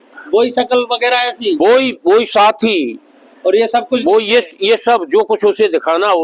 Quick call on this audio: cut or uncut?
uncut